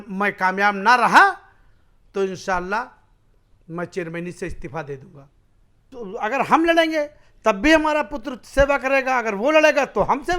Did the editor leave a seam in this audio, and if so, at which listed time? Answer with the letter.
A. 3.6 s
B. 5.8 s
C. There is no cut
B